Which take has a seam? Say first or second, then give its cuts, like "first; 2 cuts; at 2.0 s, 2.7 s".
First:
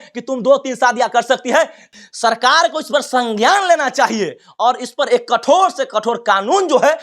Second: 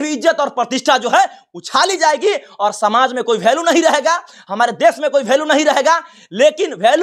first; 1 cut; at 1.9 s